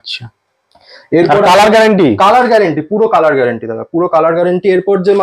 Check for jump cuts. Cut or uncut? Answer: uncut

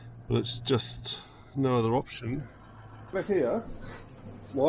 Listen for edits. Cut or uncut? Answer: cut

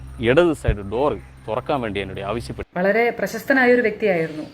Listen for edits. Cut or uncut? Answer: cut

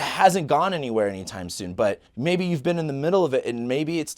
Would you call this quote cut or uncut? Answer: cut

